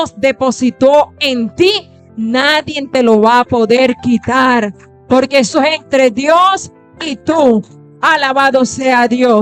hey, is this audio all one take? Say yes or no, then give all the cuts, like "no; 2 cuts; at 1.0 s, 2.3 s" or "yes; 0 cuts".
yes; 0 cuts